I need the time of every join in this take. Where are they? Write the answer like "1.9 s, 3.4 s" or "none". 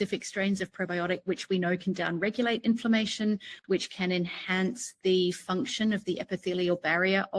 none